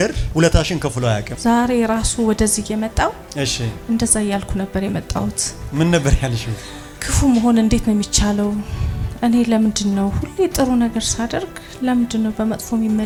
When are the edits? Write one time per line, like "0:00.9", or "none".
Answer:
none